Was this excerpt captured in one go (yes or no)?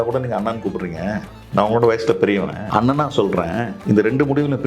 no